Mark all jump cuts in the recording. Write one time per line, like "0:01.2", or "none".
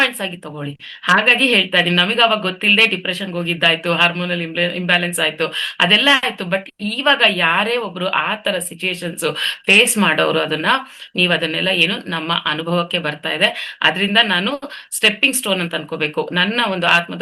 none

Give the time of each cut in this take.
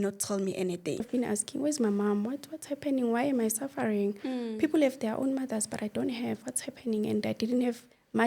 0:01.1

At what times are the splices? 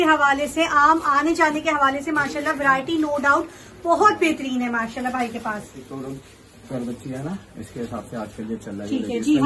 0:05.9

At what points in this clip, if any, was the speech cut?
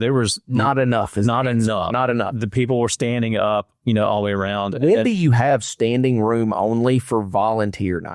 none

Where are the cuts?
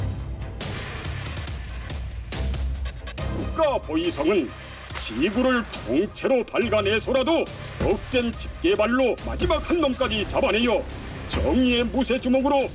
none

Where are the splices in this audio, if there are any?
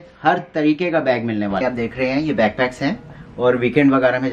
0:01.6

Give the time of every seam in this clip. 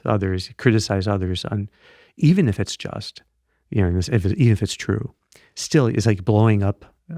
none

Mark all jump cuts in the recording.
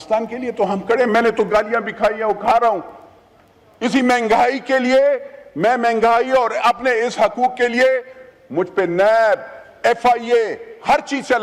none

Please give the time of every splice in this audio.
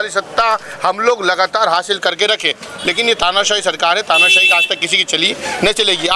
none

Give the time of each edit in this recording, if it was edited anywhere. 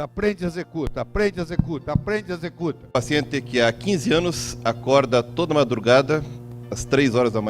0:02.9

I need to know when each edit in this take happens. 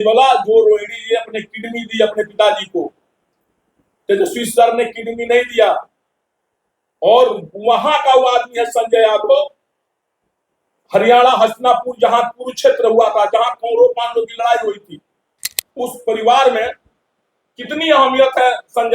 0:15.6

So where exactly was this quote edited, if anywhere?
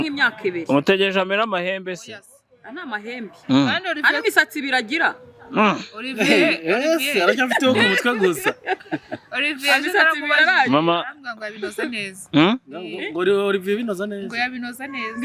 none

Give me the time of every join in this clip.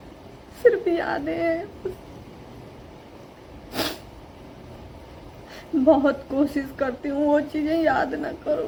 none

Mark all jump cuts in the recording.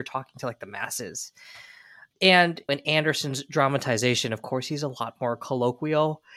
none

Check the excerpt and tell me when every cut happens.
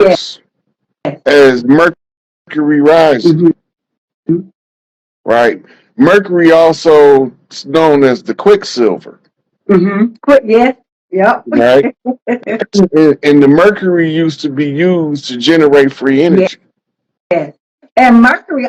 none

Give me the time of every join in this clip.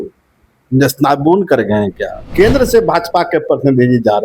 0:02.3

